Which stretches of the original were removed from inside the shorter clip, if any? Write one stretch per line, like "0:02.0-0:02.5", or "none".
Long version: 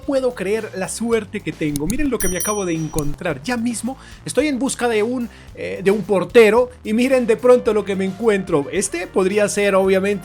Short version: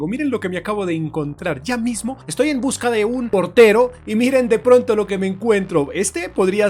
0:04.0-0:04.2
0:05.3-0:06.1